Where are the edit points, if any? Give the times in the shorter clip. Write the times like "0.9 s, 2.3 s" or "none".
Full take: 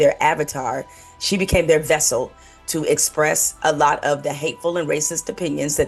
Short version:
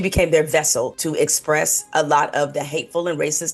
1.0 s